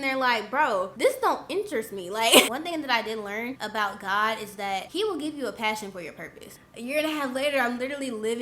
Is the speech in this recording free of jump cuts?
no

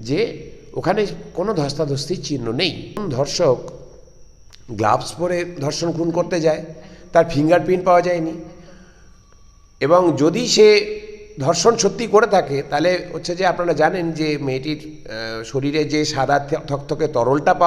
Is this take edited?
yes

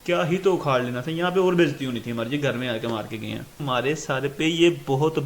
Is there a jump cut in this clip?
yes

